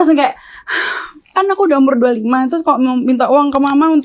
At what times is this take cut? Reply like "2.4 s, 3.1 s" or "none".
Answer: 1.2 s